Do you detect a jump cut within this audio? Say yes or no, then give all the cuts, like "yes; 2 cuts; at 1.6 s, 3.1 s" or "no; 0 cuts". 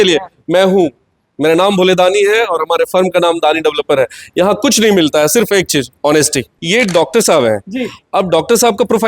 yes; 1 cut; at 6.6 s